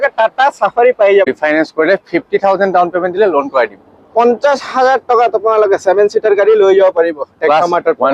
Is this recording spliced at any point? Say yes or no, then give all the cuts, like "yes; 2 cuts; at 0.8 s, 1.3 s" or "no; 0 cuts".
yes; 1 cut; at 1.3 s